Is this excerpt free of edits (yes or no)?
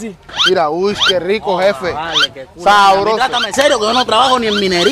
yes